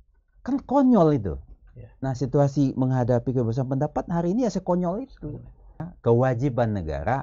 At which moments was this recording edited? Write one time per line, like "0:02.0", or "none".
0:05.9